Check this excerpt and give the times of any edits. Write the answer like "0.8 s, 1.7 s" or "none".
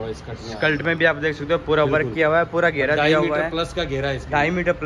none